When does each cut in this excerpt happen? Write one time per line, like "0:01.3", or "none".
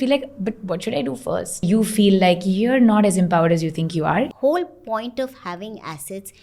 0:01.6
0:04.3

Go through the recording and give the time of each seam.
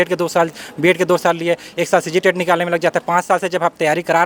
none

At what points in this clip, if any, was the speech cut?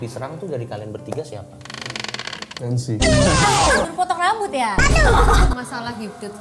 0:02.5
0:03.9
0:05.5

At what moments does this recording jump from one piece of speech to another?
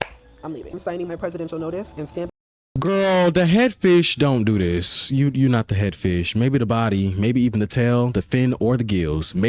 none

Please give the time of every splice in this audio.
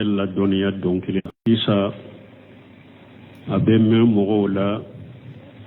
0:01.4

